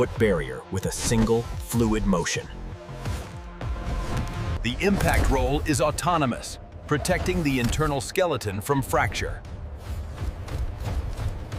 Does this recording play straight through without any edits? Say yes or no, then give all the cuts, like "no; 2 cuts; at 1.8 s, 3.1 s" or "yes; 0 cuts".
yes; 0 cuts